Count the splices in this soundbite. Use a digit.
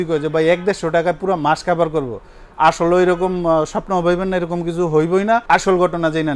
1